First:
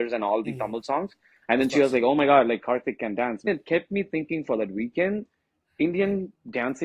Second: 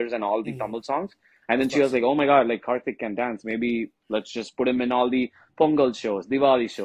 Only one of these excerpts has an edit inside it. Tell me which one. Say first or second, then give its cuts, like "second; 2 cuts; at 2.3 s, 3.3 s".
first; 1 cut; at 3.5 s